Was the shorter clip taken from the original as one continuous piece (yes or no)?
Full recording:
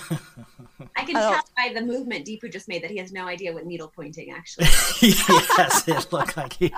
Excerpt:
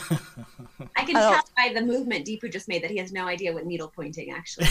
yes